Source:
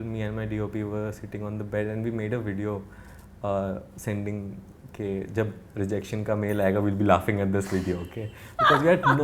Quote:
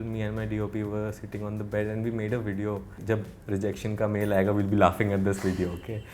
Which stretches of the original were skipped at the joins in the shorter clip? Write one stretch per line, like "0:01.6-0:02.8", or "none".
0:03.0-0:05.3